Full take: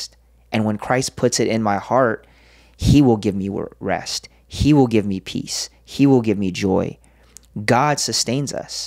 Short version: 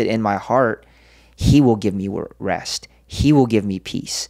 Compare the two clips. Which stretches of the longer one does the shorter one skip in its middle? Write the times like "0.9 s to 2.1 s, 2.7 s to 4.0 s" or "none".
none